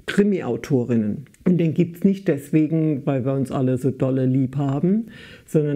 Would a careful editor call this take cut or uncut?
cut